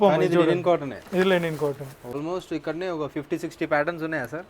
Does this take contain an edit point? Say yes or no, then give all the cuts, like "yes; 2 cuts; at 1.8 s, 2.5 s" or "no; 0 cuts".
yes; 1 cut; at 2.2 s